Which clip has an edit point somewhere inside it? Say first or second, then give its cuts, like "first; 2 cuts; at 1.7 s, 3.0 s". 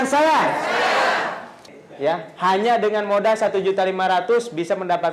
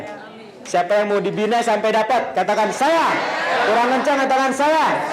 first; 1 cut; at 1.7 s